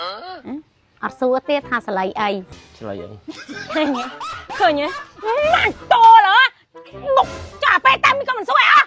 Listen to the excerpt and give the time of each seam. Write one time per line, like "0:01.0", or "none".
0:02.5